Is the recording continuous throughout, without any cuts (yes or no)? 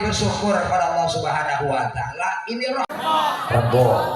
no